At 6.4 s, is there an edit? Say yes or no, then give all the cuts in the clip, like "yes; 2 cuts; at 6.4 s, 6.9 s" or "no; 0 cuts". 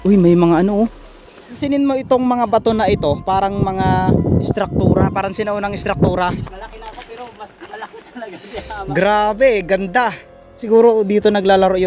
yes; 3 cuts; at 1.6 s, 6.4 s, 10.6 s